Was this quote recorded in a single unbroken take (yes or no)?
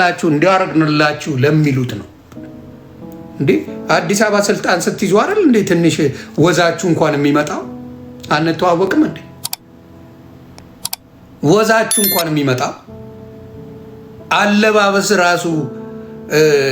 no